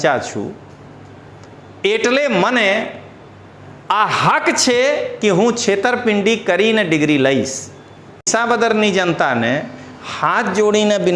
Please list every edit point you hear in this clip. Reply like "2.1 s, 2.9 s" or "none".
8.3 s